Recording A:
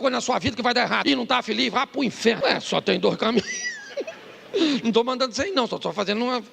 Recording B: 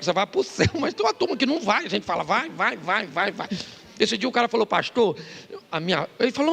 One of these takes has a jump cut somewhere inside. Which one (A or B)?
A